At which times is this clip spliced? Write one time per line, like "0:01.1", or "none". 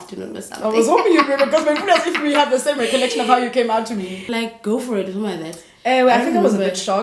0:04.3